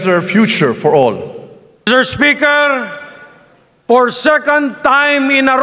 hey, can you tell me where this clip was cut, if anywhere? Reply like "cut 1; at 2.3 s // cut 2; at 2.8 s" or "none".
cut 1; at 1.9 s